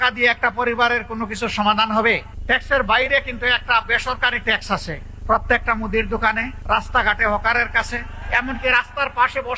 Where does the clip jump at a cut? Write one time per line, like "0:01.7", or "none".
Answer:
0:02.3
0:05.1
0:06.5
0:08.2